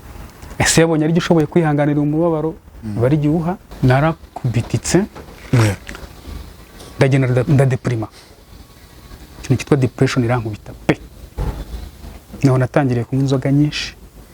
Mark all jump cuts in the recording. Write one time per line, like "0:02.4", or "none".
0:03.7

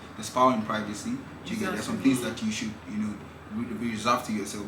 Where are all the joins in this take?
none

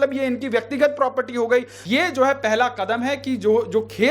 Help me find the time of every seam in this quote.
0:01.8

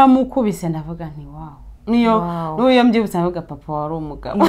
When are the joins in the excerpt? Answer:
none

